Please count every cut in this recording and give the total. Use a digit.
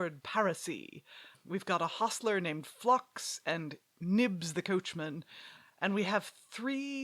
2